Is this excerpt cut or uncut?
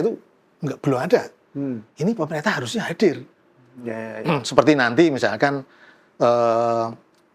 uncut